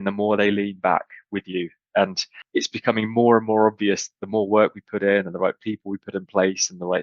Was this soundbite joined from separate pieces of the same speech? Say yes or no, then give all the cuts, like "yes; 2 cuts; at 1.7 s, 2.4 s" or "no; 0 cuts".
yes; 1 cut; at 2.3 s